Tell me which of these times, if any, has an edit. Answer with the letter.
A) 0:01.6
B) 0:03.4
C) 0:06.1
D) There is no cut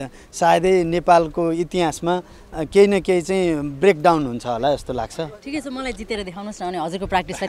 D